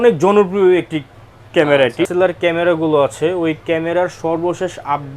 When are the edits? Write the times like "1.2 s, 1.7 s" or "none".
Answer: 2.1 s